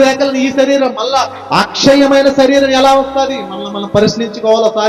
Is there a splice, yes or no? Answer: no